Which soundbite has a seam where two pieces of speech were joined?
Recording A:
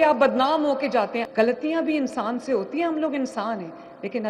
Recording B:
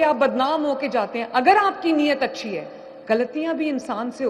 A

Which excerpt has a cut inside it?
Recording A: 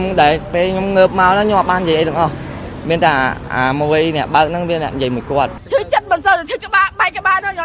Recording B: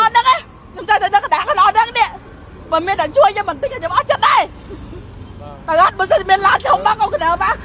A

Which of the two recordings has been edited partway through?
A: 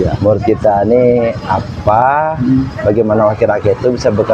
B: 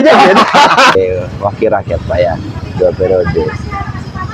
B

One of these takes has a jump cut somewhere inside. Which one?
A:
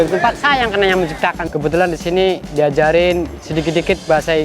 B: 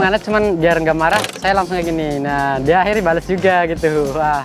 A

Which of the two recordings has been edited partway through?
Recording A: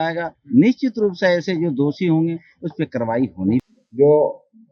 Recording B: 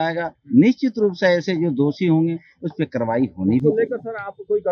A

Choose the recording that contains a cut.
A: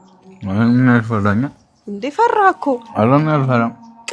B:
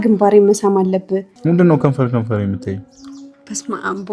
B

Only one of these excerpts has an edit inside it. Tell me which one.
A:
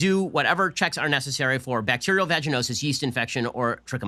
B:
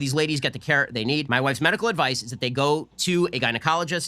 B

